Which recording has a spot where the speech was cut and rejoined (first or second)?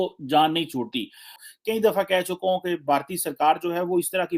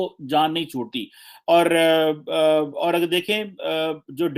first